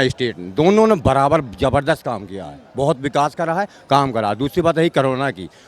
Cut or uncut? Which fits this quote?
uncut